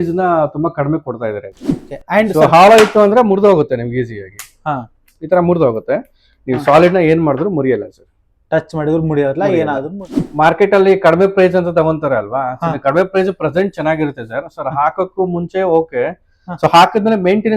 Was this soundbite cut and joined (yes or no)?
yes